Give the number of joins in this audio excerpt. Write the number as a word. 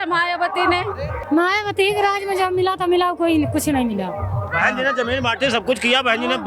one